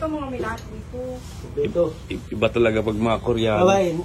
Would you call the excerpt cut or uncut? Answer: uncut